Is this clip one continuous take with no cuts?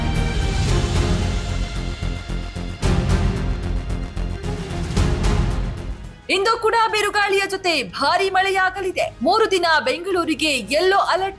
no; 1 cut; at 3.1 s

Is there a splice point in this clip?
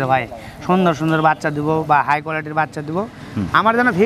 no; 0 cuts

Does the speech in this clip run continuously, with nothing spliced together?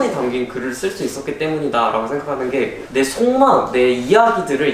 no; 1 cut; at 2.8 s

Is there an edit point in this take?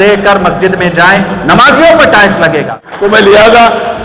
yes; 1 cut; at 2.8 s

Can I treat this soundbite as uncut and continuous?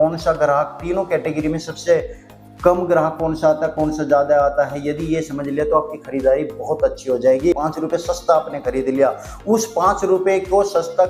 no; 1 cut; at 7.5 s

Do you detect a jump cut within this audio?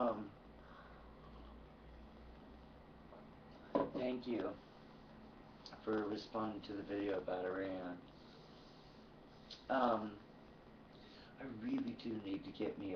yes; 1 cut; at 5.5 s

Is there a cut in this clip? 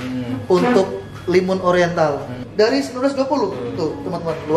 yes; 1 cut; at 2.3 s

